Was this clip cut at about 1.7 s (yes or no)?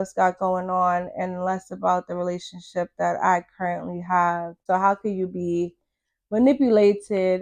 no